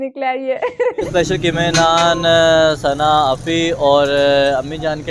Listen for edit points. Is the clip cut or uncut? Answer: cut